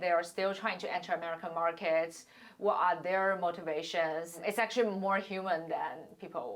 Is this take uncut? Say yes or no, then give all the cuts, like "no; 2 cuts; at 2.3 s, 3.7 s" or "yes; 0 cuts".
no; 1 cut; at 4.3 s